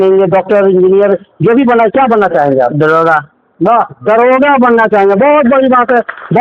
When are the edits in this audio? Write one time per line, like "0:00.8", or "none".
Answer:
none